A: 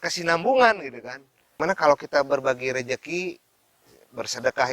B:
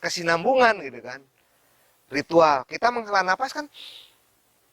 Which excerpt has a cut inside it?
A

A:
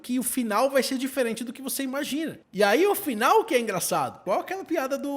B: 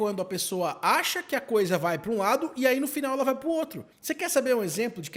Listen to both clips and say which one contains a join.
A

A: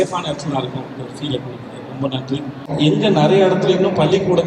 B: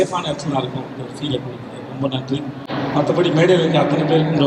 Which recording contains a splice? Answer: A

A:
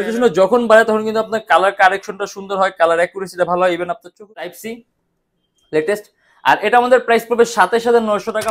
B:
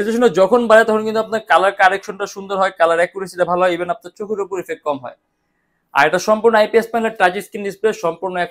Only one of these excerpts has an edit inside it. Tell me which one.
A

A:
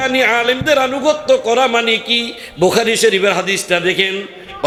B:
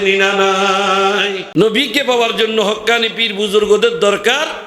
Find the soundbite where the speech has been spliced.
B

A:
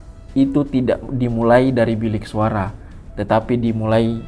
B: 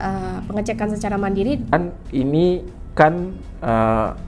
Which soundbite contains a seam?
B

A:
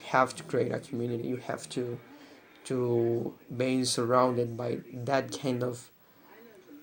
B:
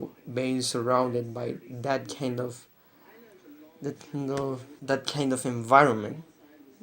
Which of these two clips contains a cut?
B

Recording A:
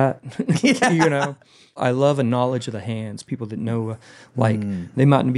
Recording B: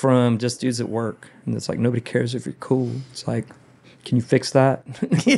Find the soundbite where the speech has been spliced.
A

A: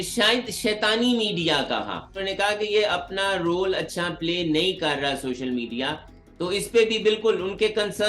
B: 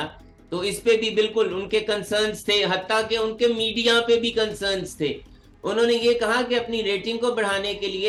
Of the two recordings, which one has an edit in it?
A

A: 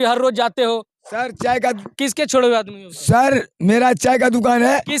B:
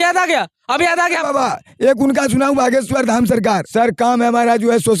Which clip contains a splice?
B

